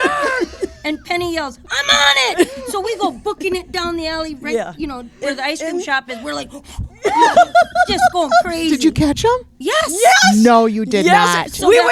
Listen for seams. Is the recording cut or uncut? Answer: uncut